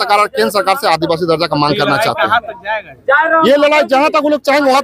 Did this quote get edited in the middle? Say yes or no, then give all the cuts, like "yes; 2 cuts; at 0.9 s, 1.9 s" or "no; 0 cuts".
no; 0 cuts